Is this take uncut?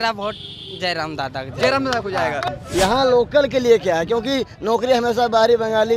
no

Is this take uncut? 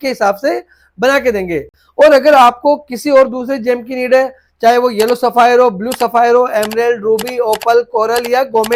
yes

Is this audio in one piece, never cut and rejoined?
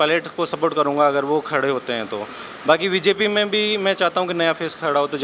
yes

